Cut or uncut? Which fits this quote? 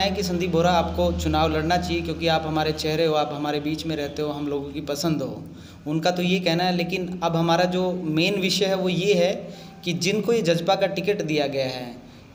uncut